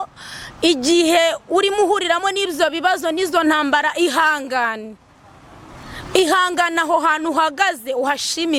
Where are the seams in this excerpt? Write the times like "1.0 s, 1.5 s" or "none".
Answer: none